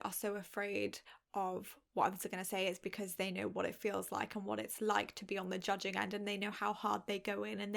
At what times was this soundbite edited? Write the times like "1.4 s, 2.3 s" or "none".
none